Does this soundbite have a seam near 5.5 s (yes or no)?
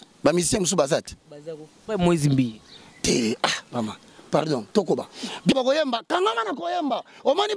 yes